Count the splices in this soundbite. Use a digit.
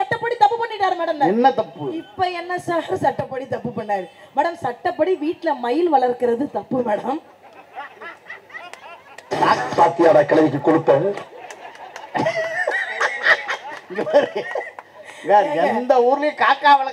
0